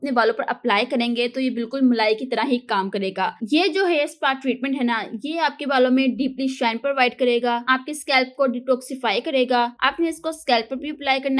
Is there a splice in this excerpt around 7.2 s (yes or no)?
no